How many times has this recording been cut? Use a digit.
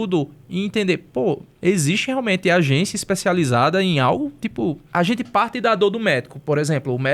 2